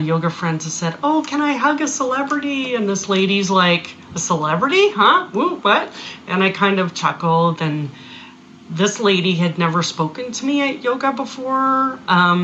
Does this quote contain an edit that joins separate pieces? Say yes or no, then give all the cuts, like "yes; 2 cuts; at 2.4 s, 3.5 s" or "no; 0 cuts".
no; 0 cuts